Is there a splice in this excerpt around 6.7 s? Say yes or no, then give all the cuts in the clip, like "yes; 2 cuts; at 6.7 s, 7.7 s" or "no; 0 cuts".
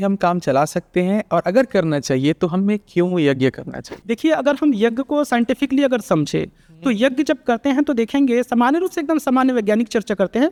no; 0 cuts